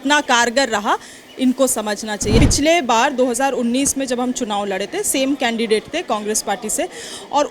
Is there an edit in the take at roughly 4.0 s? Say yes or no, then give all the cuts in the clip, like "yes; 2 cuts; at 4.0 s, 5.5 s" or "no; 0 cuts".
no; 1 cut; at 2.4 s